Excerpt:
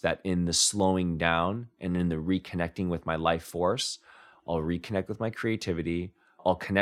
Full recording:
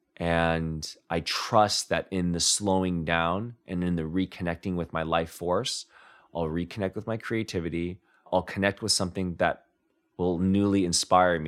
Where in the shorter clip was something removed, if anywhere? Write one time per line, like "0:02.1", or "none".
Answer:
none